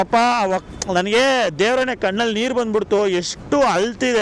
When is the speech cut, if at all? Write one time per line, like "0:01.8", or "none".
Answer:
none

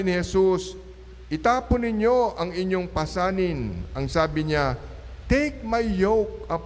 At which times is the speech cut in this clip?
none

